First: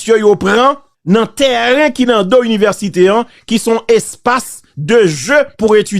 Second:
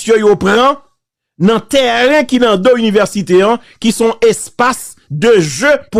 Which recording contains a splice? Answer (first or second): first